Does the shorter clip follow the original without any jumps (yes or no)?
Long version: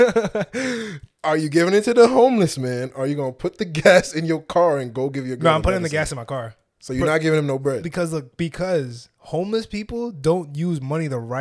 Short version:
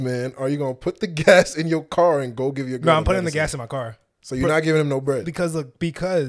yes